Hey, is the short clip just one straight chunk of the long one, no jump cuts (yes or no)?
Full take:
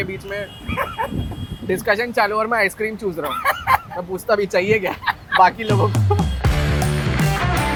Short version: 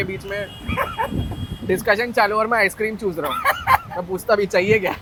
yes